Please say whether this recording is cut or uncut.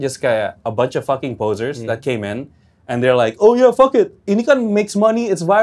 uncut